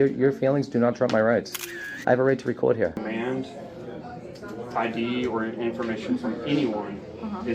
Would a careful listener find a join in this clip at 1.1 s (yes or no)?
no